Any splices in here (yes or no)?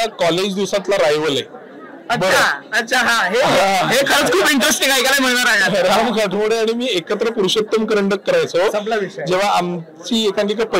no